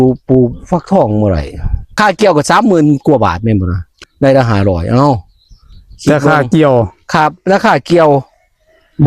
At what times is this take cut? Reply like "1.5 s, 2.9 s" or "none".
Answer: 1.9 s, 4.0 s